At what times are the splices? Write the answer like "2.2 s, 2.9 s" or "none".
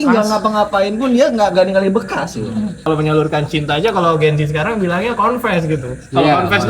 2.8 s